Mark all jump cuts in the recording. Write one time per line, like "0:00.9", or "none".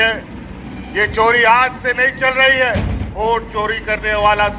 0:03.1